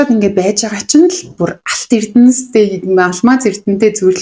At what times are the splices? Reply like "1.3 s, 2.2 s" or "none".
none